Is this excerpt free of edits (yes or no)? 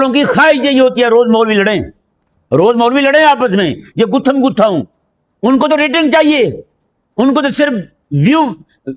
yes